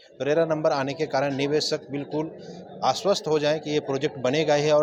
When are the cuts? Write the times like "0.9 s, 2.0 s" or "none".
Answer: none